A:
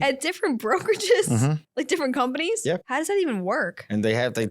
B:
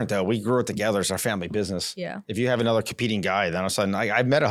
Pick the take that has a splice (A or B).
A